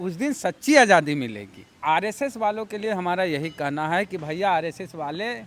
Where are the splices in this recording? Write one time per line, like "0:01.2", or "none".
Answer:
0:01.8